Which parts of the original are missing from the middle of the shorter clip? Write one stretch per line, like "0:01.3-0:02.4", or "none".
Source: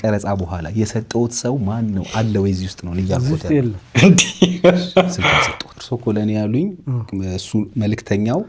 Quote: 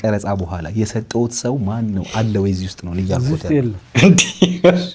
none

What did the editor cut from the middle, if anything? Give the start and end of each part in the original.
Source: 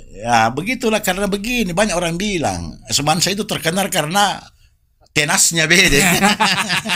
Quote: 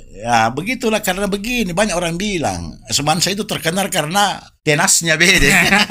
0:04.5-0:05.0

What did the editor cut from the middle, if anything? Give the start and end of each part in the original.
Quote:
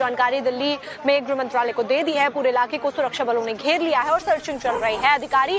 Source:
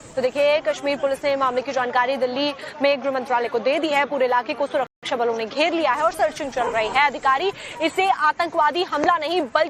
0:04.9-0:05.1

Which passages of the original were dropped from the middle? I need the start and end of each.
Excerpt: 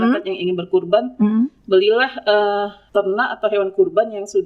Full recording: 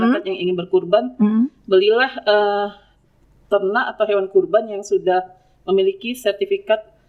0:02.8-0:03.4

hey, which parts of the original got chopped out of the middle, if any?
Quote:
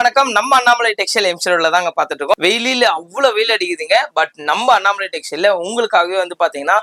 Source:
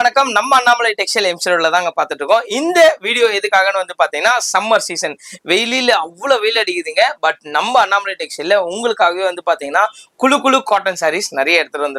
0:02.3-0:05.4

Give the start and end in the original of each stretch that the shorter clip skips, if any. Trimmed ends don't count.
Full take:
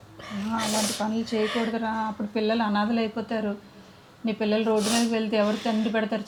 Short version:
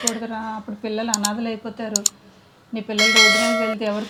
none

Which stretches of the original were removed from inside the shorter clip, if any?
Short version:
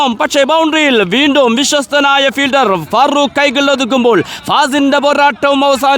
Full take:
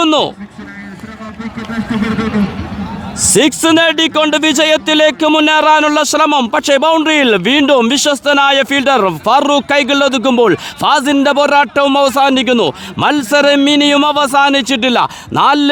none

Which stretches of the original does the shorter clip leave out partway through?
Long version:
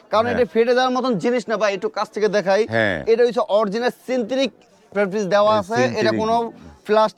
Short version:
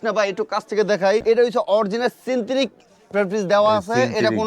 0:02.7-0:03.0

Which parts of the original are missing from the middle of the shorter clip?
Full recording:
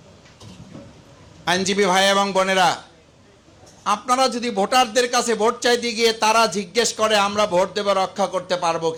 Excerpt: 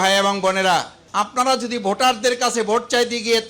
0:02.9-0:03.7

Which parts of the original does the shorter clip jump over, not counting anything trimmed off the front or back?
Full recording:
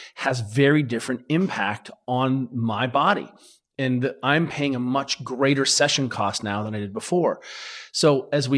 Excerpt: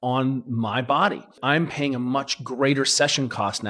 0:03.4-0:04.2

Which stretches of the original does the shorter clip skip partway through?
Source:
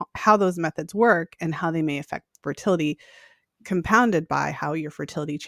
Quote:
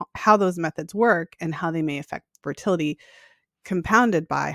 none

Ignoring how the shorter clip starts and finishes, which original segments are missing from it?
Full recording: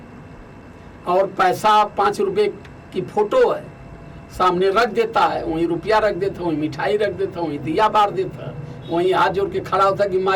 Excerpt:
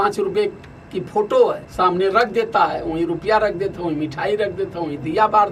0:03.7-0:04.3

